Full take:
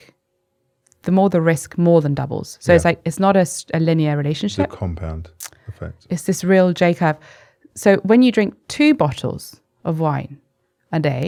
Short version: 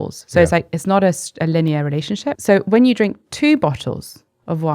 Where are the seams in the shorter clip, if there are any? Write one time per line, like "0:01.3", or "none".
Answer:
0:02.3